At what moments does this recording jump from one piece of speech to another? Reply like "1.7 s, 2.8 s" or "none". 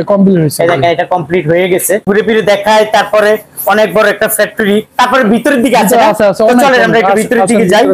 2.0 s